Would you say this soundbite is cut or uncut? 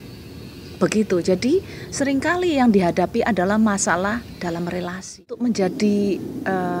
cut